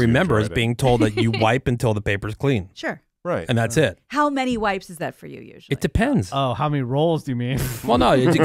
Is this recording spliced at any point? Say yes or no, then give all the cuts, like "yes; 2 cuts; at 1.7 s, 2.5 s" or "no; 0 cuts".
no; 0 cuts